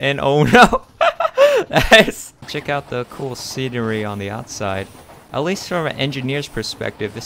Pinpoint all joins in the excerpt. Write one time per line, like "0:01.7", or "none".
0:02.4